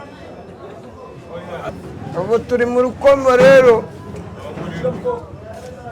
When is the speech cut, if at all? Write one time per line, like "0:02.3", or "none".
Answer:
0:01.7